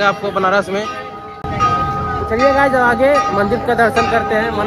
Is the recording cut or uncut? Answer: uncut